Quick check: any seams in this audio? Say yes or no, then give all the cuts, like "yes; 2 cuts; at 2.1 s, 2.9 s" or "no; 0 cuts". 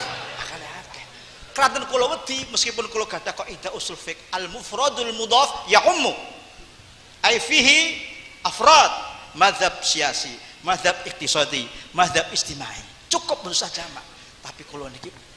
no; 0 cuts